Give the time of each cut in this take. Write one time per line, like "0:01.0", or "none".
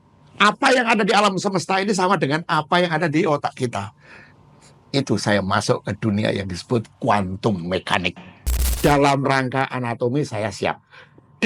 0:08.6